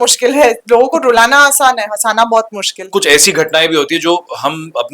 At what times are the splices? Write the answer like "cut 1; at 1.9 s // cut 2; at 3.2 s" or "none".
cut 1; at 2.8 s